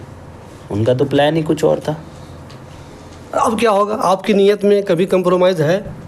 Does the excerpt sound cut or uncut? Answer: uncut